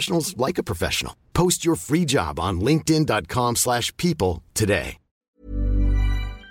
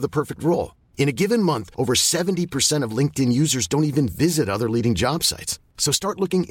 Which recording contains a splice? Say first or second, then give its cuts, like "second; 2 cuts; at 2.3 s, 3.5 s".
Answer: first; 1 cut; at 5.3 s